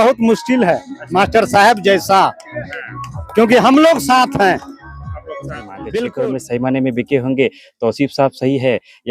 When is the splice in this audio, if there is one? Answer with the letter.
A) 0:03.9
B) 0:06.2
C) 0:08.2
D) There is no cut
B